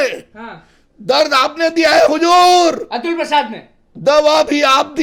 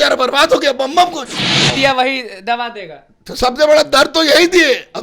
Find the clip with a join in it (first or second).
second